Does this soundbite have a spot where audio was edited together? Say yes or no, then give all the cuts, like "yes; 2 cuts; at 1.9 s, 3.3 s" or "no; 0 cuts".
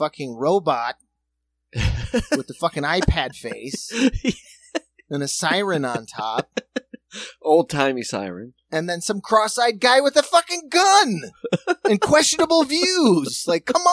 no; 0 cuts